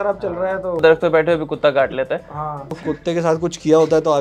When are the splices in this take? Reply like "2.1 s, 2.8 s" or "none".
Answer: 0.8 s, 2.7 s